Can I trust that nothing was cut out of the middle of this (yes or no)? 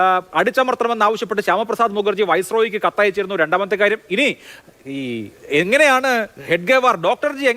yes